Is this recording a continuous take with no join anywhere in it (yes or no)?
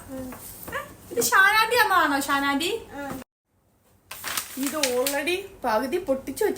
no